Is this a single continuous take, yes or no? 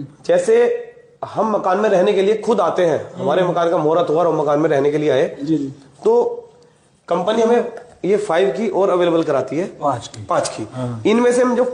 yes